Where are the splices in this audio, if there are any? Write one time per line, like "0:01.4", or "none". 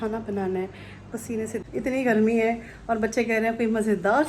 0:01.6